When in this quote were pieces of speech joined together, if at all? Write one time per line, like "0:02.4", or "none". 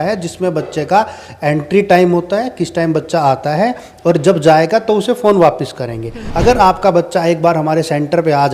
0:06.2